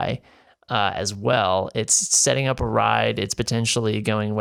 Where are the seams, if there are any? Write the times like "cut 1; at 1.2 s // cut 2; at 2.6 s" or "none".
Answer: none